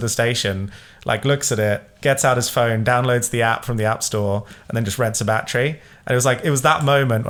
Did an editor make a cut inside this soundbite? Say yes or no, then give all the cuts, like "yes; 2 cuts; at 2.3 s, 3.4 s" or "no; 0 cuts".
no; 0 cuts